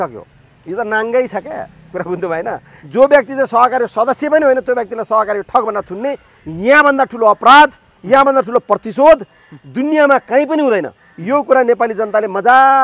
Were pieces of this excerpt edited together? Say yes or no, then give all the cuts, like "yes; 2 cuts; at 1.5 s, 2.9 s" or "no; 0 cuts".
yes; 1 cut; at 2.8 s